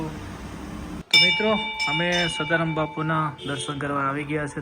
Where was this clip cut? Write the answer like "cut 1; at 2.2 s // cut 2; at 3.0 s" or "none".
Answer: cut 1; at 1.0 s